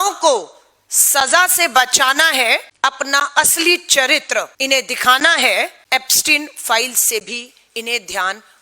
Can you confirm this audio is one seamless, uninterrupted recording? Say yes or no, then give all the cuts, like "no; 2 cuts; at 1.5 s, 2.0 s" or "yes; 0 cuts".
no; 3 cuts; at 2.7 s, 4.5 s, 5.8 s